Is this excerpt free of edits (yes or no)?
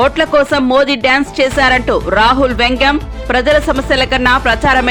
yes